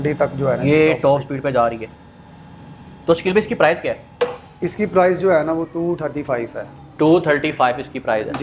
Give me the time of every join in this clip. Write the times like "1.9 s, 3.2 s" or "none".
none